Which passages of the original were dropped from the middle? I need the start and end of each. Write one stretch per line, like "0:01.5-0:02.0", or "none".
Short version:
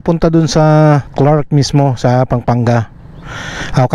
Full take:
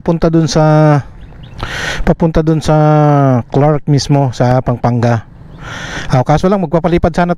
0:01.1-0:03.5